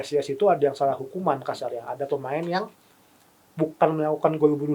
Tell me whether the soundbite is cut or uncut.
uncut